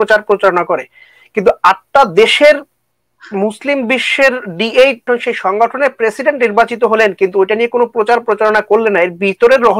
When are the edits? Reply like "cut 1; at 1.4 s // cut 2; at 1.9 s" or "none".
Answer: cut 1; at 5.0 s